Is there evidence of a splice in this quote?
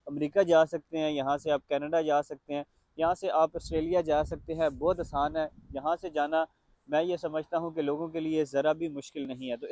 no; 0 cuts

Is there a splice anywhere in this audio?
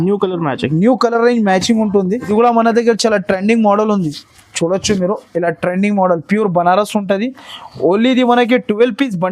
yes; 1 cut; at 2.3 s

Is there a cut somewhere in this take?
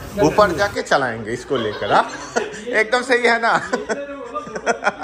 no; 0 cuts

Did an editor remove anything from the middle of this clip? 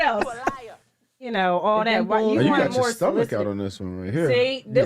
yes; 1 cut; at 1.3 s

